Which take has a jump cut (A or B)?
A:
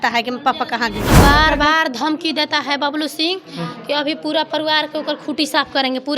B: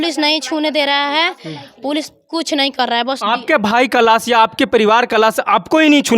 A